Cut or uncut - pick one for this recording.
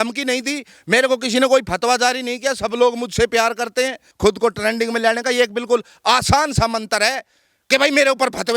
cut